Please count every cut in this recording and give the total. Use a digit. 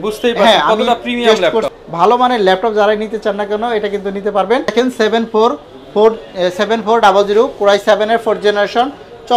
2